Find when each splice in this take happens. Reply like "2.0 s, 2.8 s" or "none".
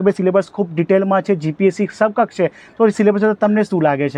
none